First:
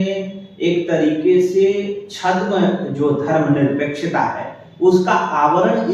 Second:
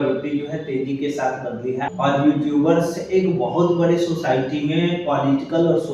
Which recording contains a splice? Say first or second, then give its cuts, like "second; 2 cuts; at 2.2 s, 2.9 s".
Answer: second; 1 cut; at 1.9 s